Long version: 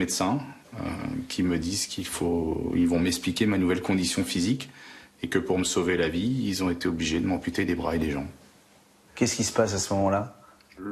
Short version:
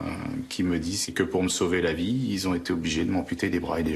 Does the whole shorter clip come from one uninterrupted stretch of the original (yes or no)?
no